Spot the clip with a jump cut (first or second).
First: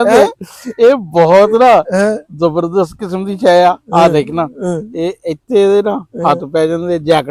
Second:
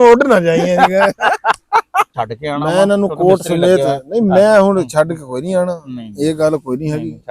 second